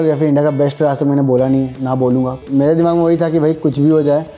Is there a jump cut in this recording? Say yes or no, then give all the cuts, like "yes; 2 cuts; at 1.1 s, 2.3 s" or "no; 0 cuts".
yes; 1 cut; at 2.4 s